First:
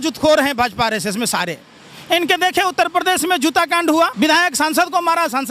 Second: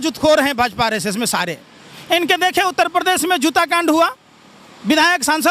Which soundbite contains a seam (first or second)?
first